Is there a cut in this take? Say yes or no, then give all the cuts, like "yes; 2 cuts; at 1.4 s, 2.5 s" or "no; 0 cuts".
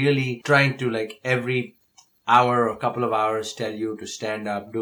no; 0 cuts